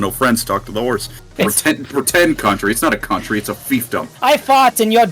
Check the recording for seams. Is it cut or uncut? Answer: cut